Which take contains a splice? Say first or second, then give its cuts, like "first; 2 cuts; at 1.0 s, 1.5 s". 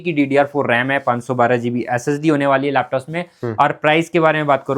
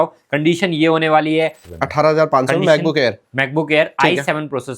second; 1 cut; at 1.6 s